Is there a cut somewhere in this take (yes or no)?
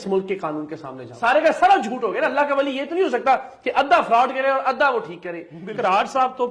yes